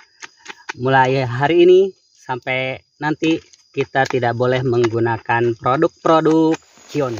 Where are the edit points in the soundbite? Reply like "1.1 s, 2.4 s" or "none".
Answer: none